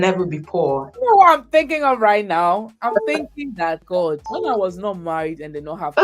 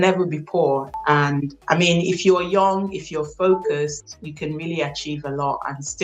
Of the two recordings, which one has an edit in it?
first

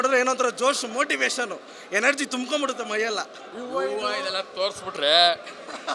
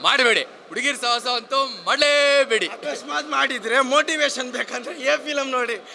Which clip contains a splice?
first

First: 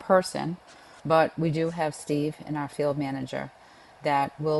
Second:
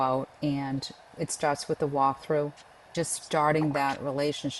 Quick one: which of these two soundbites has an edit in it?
second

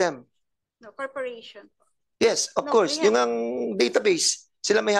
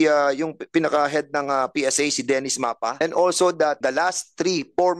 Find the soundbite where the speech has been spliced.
second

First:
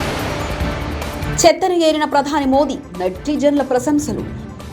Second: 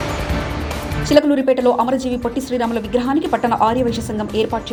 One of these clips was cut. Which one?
first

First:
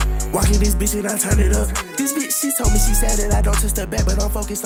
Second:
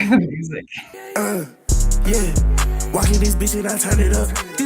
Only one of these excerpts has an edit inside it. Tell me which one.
second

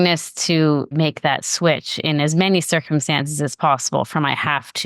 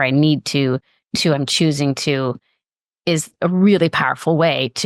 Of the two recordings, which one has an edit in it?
first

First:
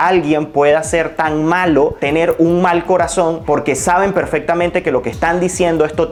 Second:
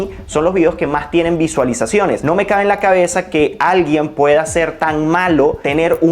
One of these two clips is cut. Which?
second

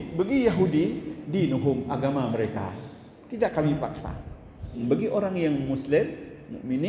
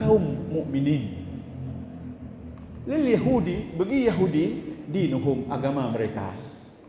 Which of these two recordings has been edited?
first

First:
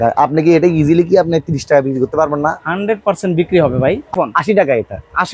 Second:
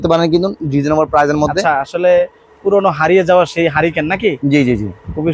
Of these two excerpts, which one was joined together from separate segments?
first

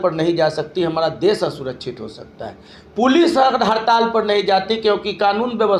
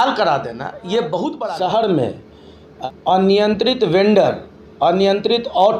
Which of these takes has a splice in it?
second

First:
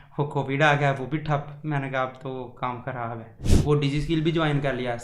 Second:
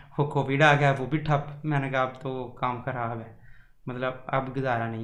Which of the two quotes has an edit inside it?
first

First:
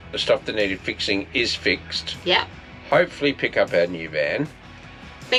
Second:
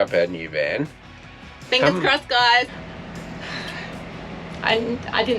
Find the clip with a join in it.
second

